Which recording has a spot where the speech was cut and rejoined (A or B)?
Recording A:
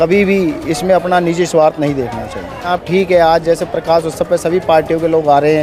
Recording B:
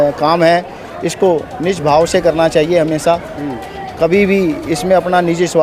A